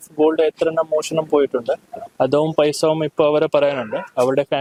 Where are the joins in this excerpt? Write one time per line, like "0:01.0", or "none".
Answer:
none

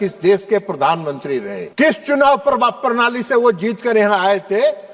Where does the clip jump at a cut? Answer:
0:01.6

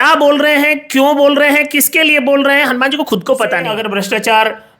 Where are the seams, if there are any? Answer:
0:03.8

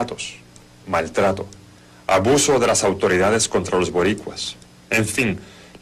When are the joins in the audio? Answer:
0:02.4

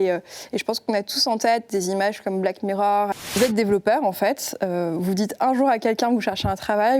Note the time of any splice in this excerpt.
0:03.2

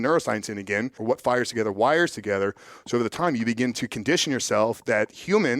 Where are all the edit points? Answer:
0:01.0

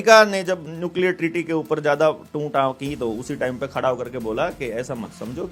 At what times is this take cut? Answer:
none

